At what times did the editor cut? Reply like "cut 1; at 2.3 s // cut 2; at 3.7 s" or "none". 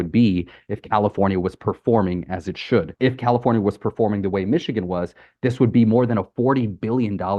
cut 1; at 2.9 s

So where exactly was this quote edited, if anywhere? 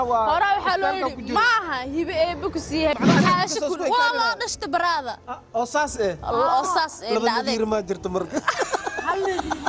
cut 1; at 3.0 s

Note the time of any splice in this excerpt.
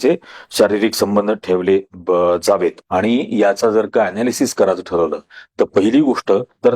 cut 1; at 2.8 s

